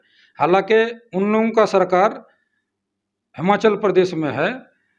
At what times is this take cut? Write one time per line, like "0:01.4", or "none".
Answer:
none

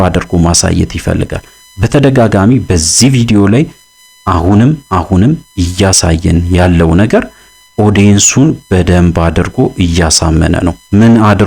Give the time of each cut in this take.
none

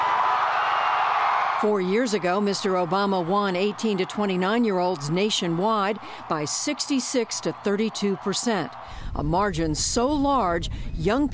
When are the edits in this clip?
0:01.5

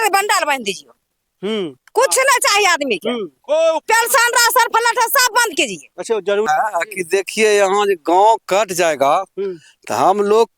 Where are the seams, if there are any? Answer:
0:06.5

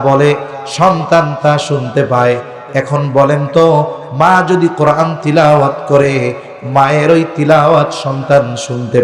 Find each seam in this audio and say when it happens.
none

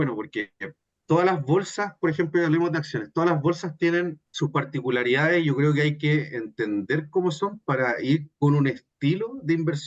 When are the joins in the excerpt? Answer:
0:04.2

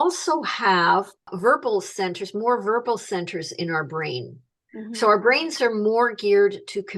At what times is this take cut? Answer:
0:01.3

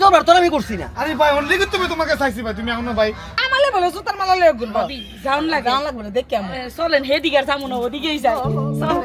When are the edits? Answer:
0:03.4

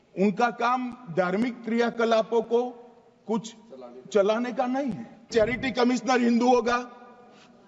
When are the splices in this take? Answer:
0:05.3

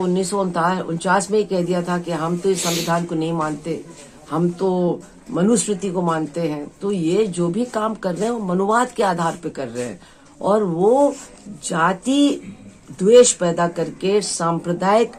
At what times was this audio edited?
none

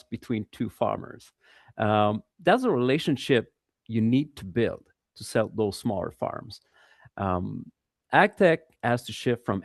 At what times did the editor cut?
none

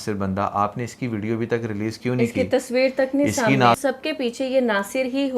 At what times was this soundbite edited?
0:03.8

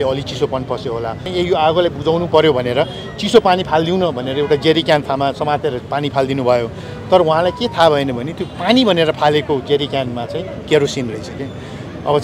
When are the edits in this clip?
0:01.2

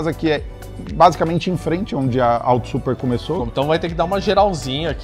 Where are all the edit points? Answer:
0:03.4

